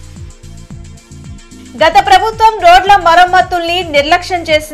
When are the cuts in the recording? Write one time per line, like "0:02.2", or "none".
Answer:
0:01.0